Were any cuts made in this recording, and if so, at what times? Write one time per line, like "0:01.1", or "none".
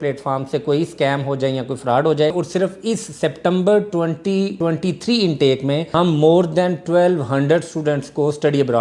0:02.3
0:04.5
0:05.9

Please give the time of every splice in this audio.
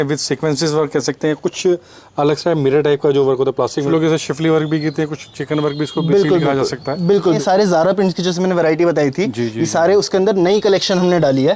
0:03.9
0:07.4

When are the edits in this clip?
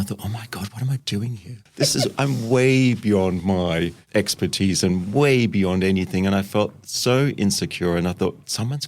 0:01.6

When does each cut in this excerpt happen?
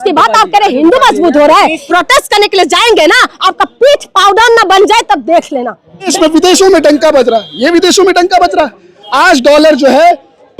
0:01.8
0:06.1

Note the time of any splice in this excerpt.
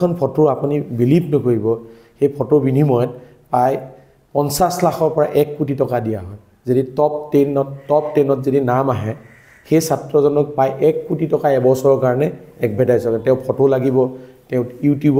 none

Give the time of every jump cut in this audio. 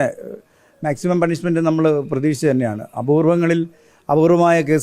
none

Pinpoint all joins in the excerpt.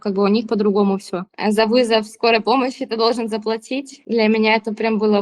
0:01.2
0:03.9

